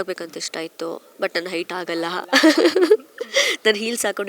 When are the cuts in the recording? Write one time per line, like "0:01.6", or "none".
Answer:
none